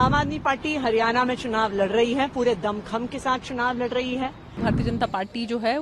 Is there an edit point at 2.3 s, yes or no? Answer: no